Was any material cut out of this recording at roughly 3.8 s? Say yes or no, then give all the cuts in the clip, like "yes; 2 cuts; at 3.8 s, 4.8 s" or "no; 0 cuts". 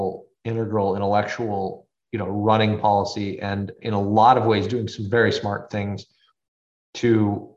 yes; 2 cuts; at 1.9 s, 3.8 s